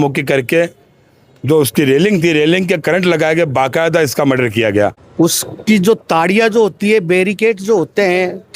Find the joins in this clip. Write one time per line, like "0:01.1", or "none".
0:05.0